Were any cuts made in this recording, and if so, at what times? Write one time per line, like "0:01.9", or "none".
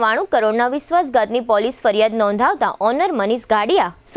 none